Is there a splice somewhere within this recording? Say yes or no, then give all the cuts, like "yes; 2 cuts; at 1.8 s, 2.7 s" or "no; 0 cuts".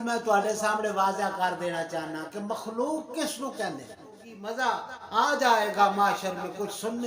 yes; 1 cut; at 4.5 s